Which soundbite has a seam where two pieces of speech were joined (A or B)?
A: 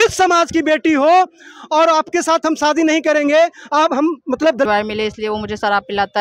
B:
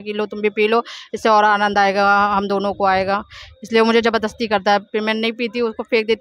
A